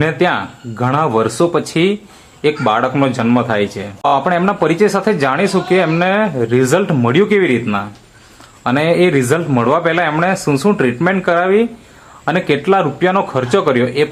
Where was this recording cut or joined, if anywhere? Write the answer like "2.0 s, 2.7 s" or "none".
4.1 s